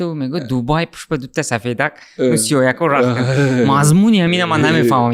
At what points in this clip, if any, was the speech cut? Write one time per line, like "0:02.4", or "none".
none